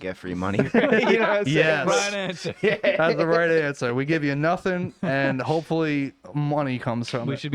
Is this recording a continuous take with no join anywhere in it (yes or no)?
yes